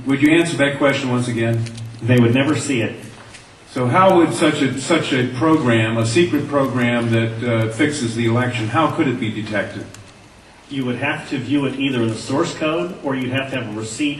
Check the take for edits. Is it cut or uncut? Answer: cut